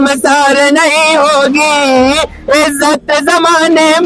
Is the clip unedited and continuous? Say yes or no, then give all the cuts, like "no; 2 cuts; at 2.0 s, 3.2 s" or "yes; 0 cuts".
yes; 0 cuts